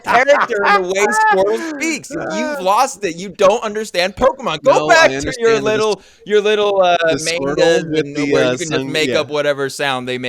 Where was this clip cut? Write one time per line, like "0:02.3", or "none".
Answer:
none